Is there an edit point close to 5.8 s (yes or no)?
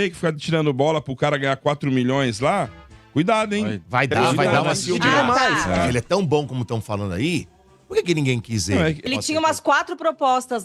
yes